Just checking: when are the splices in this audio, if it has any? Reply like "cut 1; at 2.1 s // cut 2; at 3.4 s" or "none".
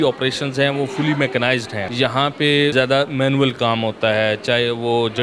cut 1; at 1.8 s // cut 2; at 2.7 s